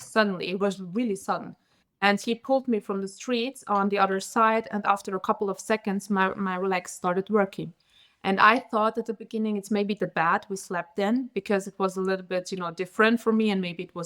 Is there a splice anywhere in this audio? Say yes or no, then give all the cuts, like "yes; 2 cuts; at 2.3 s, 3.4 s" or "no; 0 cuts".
no; 0 cuts